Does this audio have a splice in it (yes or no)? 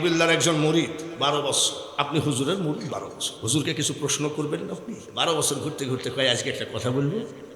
yes